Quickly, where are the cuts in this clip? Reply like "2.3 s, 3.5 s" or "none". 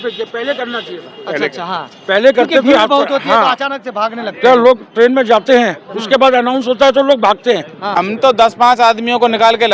8.0 s